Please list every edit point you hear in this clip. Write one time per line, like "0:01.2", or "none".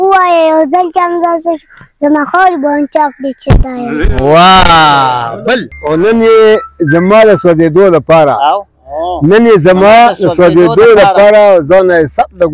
0:05.7